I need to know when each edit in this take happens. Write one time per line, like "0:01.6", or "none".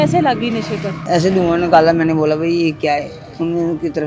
0:01.0